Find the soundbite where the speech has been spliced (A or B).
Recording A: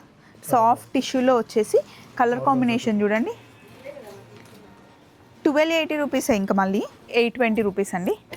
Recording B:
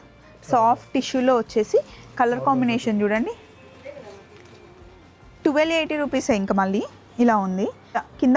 A